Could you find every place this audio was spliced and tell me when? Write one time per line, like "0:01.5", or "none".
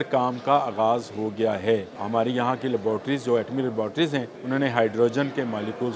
0:02.0
0:04.4